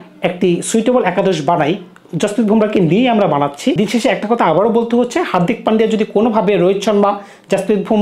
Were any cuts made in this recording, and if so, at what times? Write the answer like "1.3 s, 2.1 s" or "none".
3.8 s